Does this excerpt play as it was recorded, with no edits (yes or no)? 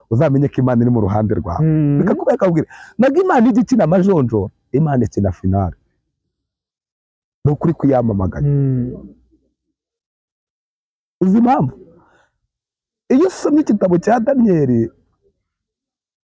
yes